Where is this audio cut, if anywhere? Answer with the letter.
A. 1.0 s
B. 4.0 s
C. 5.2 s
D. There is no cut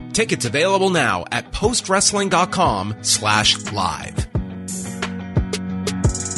B